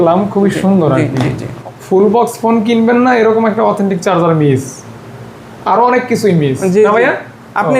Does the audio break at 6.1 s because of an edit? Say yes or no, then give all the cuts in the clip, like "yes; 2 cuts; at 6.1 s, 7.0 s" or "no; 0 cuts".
no; 1 cut; at 1.6 s